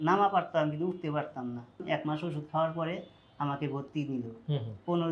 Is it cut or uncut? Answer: cut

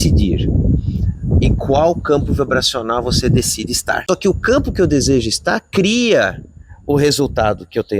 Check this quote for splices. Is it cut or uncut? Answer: cut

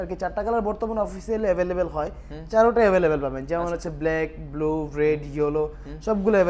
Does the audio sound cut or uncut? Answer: uncut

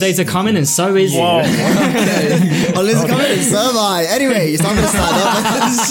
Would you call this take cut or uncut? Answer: cut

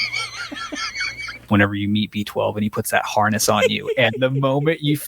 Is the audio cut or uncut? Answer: cut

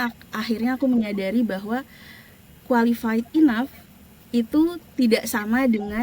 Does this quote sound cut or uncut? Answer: uncut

